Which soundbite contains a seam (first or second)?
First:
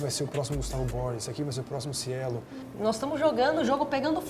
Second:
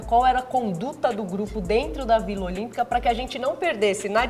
first